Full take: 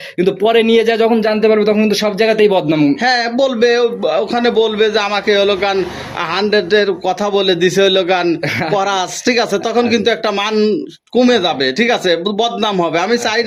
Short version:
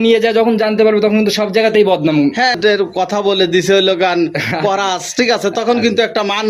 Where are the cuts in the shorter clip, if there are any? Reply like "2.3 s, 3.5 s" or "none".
2.6 s